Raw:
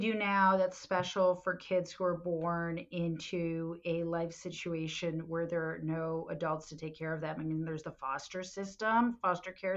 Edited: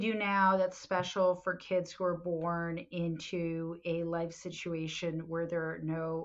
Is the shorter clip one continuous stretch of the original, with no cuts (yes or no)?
yes